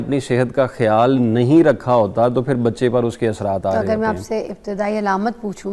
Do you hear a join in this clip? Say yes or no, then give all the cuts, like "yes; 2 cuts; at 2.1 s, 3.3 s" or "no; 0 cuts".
no; 0 cuts